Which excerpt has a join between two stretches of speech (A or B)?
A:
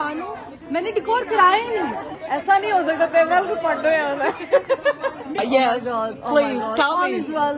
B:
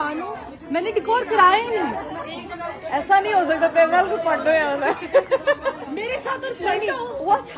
A